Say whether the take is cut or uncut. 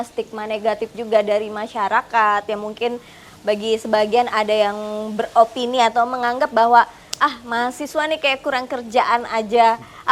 uncut